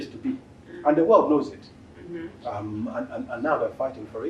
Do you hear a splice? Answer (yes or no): no